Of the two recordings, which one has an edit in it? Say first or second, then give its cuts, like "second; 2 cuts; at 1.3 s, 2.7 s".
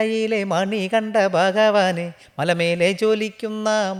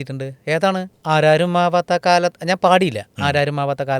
second; 1 cut; at 0.9 s